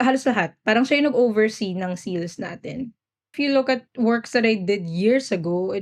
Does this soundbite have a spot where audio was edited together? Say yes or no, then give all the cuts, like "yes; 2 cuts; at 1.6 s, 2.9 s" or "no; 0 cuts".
yes; 2 cuts; at 3.3 s, 3.9 s